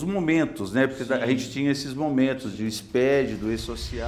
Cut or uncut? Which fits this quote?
uncut